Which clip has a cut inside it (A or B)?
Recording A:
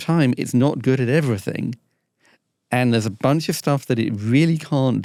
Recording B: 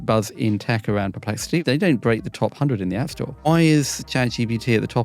B